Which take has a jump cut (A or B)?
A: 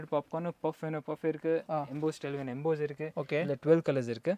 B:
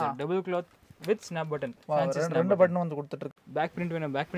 B